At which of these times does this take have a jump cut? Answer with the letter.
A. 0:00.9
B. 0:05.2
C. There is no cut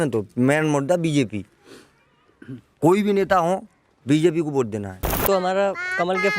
B